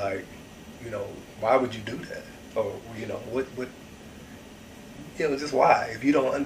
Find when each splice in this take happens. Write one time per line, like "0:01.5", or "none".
none